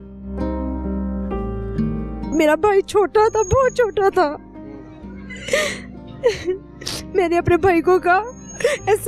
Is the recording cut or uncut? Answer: uncut